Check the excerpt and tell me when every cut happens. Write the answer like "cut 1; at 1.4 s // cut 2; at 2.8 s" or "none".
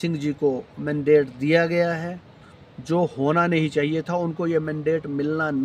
none

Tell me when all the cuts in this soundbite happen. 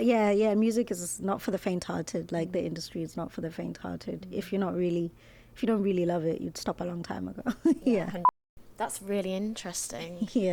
cut 1; at 8.3 s

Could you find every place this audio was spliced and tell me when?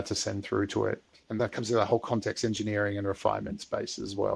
cut 1; at 1.4 s

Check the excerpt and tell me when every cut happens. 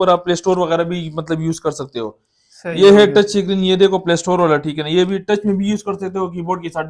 none

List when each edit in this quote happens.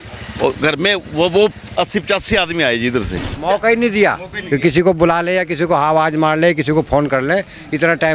cut 1; at 3.2 s

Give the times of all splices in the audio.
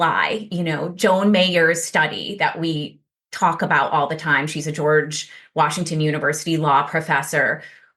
none

